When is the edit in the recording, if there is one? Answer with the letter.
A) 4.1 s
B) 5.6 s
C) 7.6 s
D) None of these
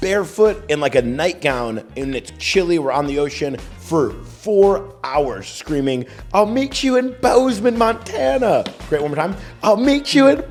D